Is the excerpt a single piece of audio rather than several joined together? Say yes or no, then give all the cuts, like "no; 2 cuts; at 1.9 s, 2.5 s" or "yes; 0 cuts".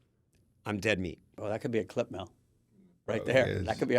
no; 1 cut; at 1.4 s